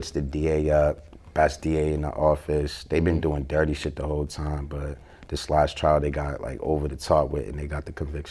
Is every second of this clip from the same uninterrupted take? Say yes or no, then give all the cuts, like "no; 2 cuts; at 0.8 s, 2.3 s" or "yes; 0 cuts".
yes; 0 cuts